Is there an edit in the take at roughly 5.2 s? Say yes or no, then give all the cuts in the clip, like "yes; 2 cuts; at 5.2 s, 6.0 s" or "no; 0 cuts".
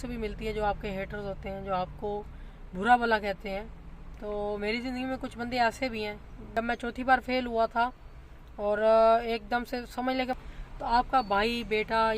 no; 2 cuts; at 6.5 s, 10.3 s